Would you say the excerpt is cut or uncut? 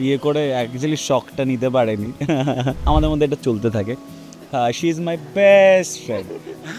cut